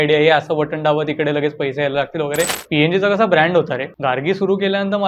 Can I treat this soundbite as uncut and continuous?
no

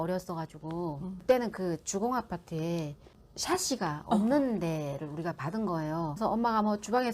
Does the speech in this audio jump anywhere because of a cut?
yes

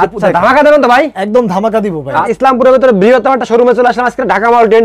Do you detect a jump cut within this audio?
yes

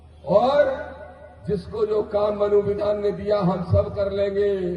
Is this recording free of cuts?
yes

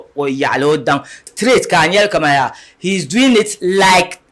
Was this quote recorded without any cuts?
no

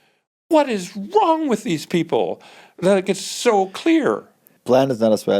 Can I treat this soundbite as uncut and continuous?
no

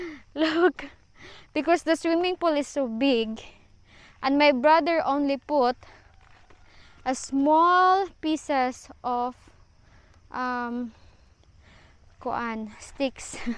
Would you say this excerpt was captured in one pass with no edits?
yes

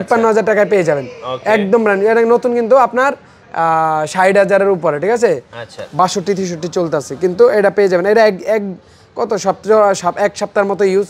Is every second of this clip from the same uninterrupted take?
yes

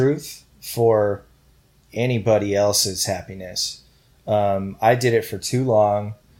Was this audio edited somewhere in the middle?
no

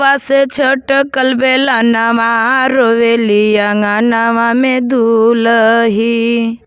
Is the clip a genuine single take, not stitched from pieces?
yes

